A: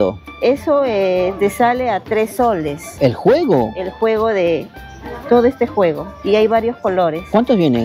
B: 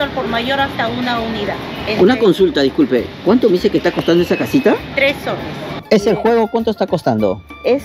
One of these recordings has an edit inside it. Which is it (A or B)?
B